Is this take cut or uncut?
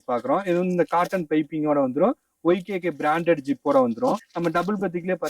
cut